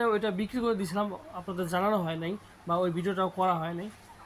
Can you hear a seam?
no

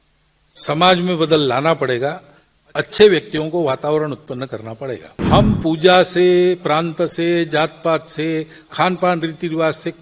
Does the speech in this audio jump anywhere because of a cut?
yes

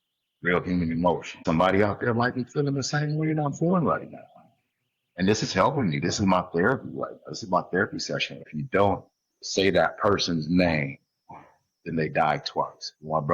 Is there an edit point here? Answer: yes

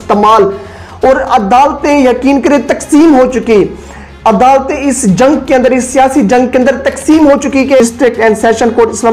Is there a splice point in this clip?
yes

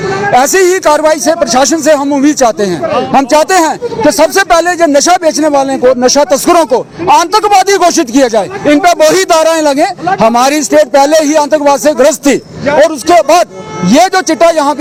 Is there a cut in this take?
no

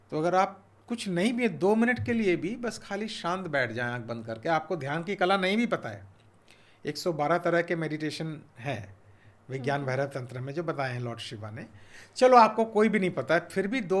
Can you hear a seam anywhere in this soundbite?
no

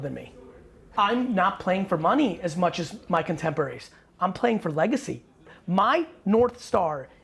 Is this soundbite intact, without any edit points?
no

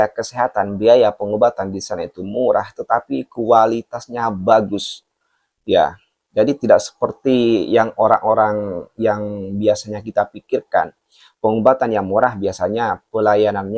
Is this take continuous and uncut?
yes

